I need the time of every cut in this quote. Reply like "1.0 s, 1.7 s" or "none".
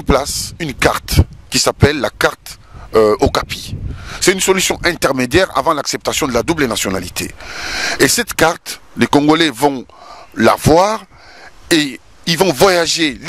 none